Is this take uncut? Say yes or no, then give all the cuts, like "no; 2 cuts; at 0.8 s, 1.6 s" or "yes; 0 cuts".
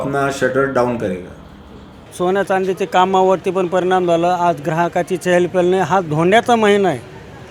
no; 1 cut; at 2.0 s